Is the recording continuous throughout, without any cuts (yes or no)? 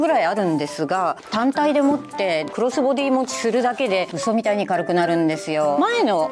yes